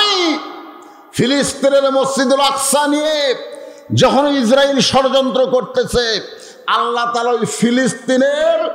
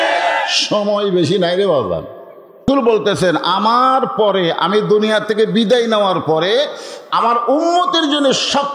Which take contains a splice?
second; 1 cut; at 2.6 s

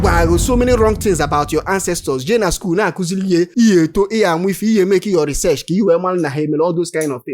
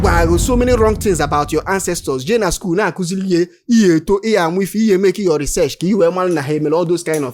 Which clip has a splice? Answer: first; 1 cut; at 3.5 s

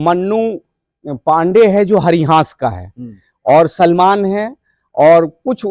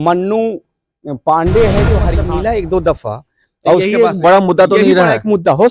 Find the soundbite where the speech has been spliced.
second; 1 cut; at 2.1 s

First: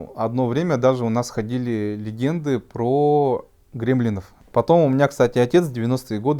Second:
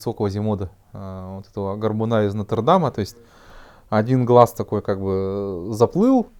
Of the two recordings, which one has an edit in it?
first; 1 cut; at 4.3 s

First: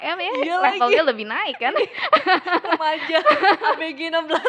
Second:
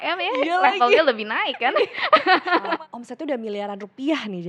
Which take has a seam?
second; 1 cut; at 2.7 s

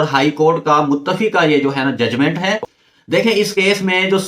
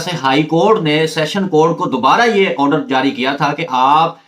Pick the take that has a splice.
first; 1 cut; at 2.8 s

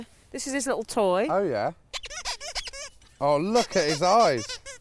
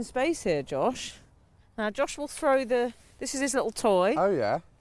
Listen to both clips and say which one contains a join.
second; 1 cut; at 1.6 s

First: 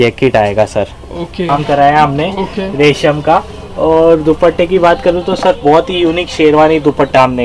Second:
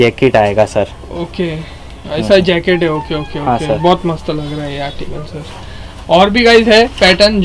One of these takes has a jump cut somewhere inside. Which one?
first; 1 cut; at 1.5 s

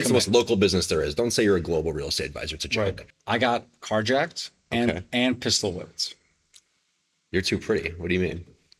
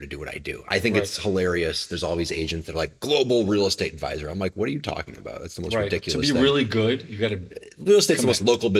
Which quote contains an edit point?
first; 1 cut; at 3.1 s

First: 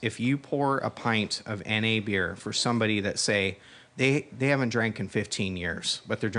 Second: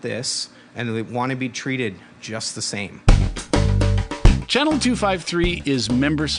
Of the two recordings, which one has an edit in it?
second; 1 cut; at 3.0 s

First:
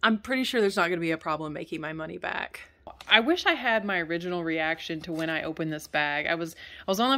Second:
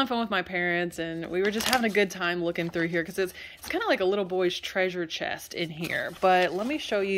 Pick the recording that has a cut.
first; 1 cut; at 3.0 s

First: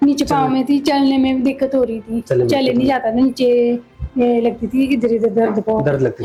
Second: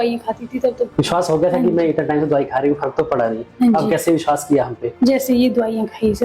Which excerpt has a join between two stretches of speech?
second; 2 cuts; at 0.9 s, 4.9 s

